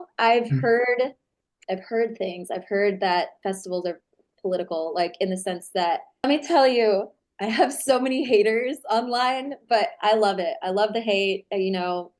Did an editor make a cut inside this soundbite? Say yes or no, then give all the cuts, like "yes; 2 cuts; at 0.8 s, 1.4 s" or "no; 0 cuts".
yes; 1 cut; at 6.3 s